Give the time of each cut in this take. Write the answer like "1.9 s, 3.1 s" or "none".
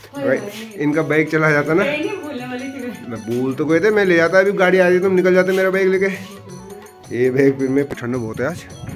7.9 s